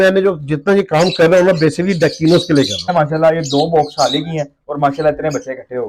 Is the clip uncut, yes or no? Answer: no